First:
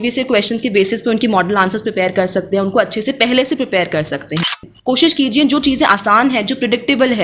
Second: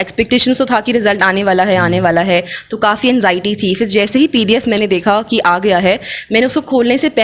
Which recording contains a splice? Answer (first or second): first